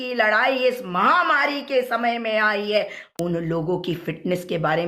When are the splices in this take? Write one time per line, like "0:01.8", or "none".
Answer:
0:03.0